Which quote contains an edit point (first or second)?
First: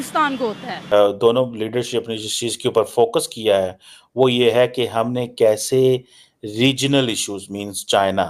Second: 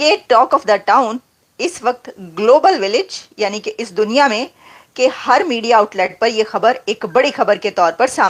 first